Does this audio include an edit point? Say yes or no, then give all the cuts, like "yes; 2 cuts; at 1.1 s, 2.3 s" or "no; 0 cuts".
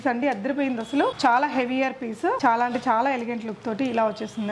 yes; 2 cuts; at 1.1 s, 2.4 s